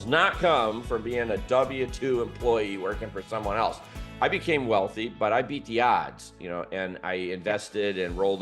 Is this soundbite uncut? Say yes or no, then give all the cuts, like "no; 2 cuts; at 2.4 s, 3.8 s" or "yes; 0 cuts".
yes; 0 cuts